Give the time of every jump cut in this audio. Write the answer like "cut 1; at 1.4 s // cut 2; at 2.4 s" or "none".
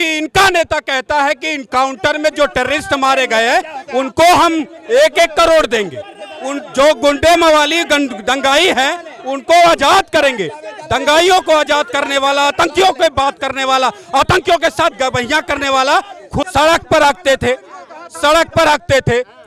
cut 1; at 16.5 s